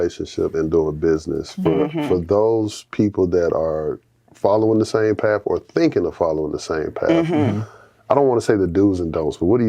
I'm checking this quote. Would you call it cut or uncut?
uncut